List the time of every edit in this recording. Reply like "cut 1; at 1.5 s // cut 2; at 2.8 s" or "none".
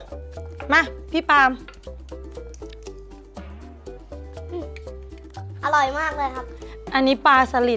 cut 1; at 1.6 s // cut 2; at 5.5 s

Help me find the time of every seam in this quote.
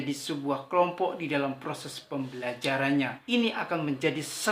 cut 1; at 3.2 s

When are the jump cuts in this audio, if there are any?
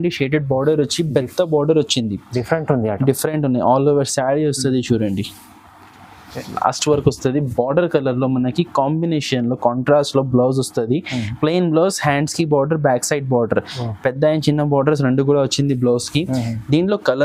none

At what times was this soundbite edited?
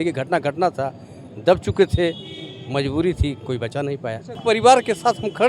cut 1; at 4.3 s

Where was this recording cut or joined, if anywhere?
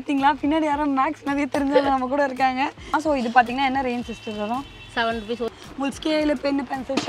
cut 1; at 3.0 s // cut 2; at 5.5 s

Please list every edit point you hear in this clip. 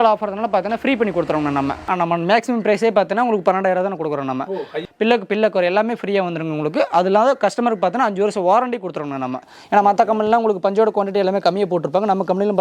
cut 1; at 1.8 s // cut 2; at 4.8 s // cut 3; at 9.5 s

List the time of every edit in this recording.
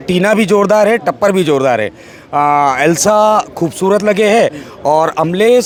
none

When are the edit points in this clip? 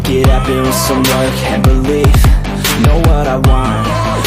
cut 1; at 1.6 s

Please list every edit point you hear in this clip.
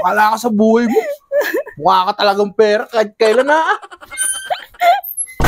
none

